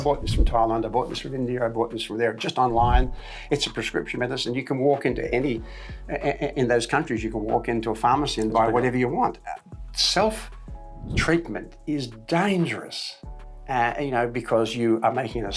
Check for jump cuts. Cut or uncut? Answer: uncut